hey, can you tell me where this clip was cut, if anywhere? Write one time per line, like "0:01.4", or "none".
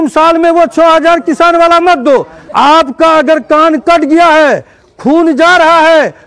0:02.4